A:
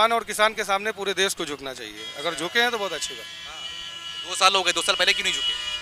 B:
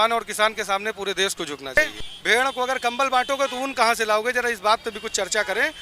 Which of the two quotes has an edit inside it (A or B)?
B